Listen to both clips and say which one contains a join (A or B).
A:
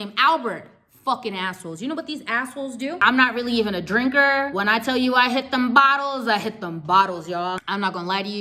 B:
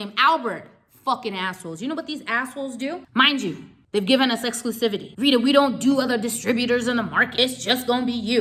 A